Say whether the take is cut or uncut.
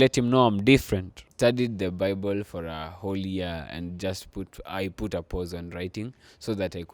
cut